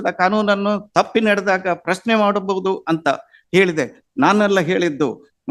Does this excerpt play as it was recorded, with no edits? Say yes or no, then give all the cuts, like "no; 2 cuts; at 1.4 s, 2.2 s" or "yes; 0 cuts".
yes; 0 cuts